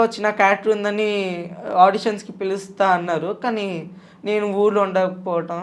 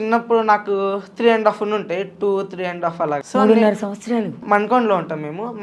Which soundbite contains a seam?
second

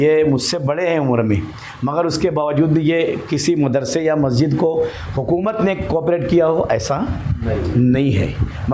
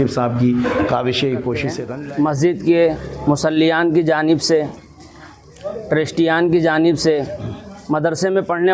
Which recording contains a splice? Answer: second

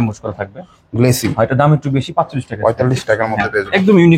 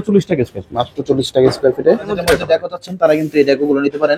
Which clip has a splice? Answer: second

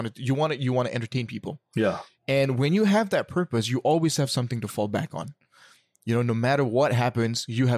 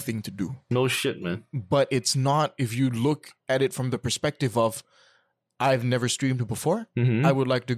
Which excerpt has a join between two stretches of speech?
second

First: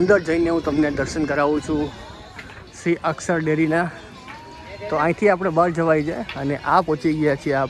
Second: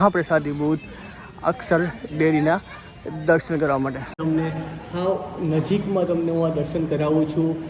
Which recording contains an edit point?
second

